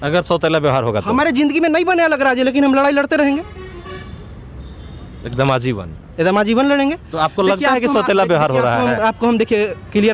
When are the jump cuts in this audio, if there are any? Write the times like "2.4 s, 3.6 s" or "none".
none